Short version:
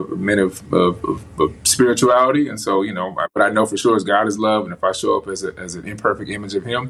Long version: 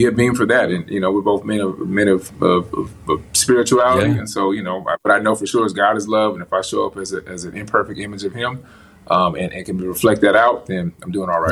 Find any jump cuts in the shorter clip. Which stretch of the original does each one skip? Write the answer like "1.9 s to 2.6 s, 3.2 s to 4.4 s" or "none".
none